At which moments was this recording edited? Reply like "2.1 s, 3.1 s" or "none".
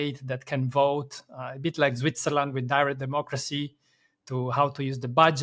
none

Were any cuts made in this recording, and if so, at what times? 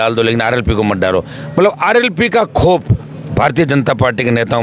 none

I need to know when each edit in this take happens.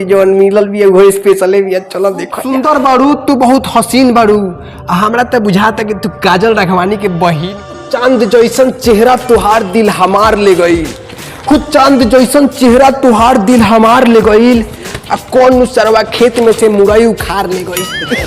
2.4 s, 7.8 s

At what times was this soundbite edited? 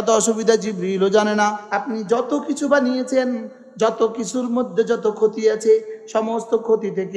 1.6 s

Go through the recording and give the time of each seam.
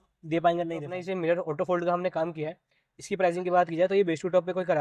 0.9 s

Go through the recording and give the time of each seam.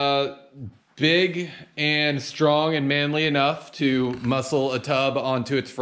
none

